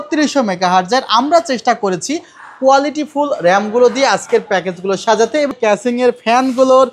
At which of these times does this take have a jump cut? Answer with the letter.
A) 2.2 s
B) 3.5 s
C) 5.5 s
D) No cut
C